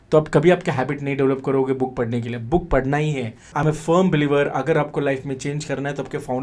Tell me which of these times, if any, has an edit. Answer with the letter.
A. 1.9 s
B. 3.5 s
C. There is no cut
B